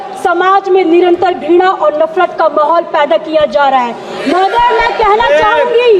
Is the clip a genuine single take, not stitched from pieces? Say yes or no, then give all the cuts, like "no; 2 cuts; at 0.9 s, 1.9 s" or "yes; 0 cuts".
yes; 0 cuts